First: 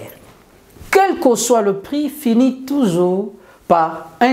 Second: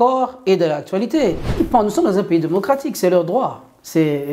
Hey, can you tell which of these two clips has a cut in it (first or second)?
second